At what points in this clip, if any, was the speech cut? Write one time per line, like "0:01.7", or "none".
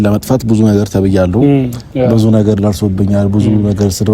none